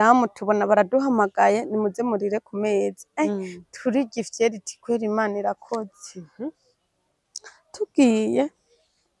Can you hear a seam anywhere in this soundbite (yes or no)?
no